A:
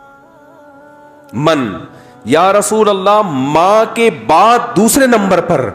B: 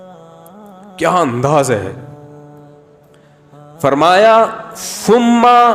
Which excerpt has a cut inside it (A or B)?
B